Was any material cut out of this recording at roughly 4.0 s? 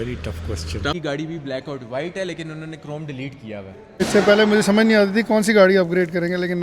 yes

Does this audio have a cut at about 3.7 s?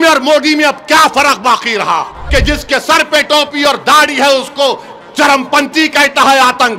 no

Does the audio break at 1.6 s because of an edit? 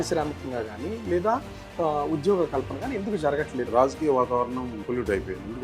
no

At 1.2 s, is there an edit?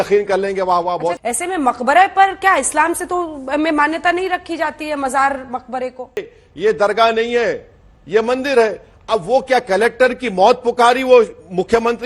yes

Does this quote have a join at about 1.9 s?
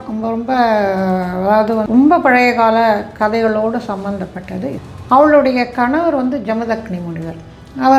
yes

